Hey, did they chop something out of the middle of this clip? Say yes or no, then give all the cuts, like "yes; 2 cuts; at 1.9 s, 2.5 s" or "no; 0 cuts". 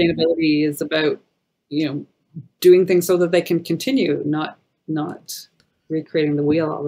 no; 0 cuts